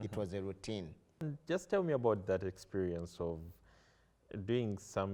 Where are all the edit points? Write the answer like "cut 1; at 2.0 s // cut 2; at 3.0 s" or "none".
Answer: cut 1; at 1.2 s